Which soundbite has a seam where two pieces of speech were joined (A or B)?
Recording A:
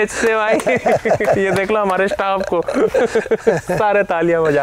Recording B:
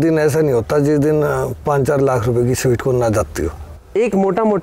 B